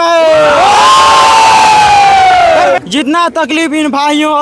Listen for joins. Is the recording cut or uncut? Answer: cut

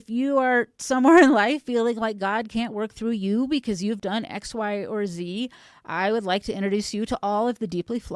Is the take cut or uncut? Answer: uncut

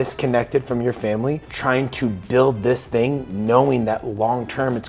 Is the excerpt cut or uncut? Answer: cut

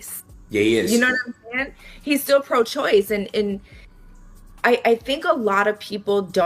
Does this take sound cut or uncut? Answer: uncut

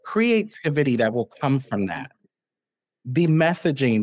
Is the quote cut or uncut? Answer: uncut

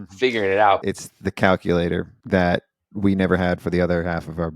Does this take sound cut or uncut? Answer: cut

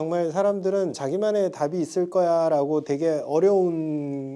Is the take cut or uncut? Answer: cut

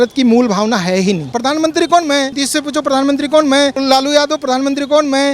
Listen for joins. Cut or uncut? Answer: cut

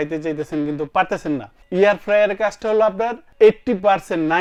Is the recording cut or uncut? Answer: uncut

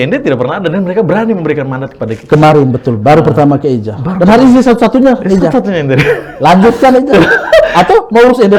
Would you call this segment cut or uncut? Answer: uncut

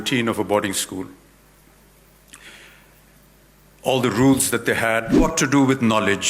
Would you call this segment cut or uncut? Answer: cut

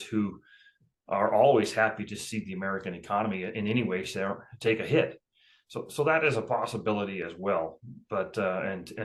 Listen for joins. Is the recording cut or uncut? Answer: uncut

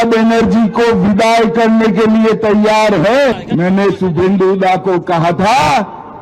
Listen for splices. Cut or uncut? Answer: cut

